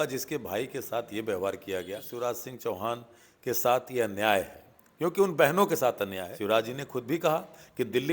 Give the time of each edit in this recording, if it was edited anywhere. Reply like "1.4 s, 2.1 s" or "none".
2.0 s, 6.3 s